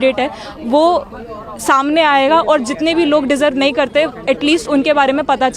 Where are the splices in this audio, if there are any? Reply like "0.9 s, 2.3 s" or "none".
none